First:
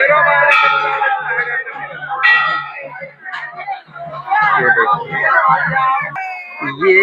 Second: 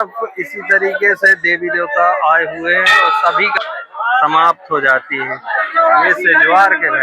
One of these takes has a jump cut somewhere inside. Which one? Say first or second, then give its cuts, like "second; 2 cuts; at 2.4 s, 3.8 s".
second; 1 cut; at 3.6 s